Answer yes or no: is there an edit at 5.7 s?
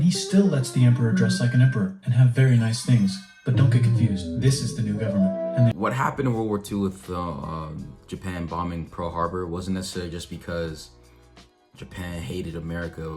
yes